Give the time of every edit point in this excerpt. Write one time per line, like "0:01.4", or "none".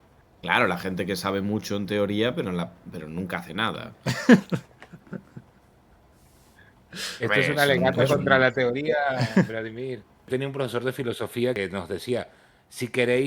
0:10.3
0:11.6